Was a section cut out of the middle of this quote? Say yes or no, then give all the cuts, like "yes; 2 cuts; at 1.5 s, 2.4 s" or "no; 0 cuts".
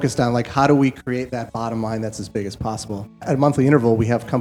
yes; 1 cut; at 3.2 s